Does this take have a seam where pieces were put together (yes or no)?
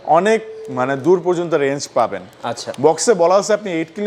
no